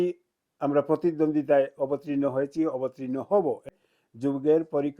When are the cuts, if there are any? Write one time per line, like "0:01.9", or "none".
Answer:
0:03.7